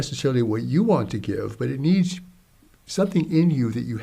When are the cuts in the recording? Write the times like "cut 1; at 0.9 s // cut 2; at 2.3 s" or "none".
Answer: none